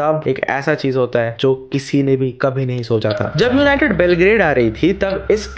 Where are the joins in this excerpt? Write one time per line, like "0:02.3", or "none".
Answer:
none